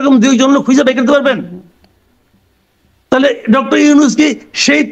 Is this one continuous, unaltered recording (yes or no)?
yes